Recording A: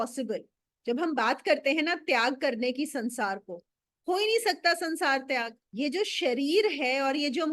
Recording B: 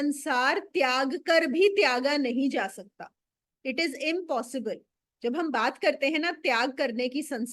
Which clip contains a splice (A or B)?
A